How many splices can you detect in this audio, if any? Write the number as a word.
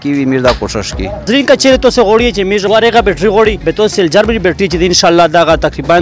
three